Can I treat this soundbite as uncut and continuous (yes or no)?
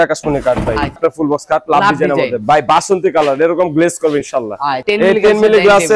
no